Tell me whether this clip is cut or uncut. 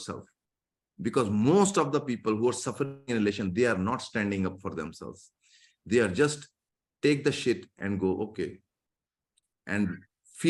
uncut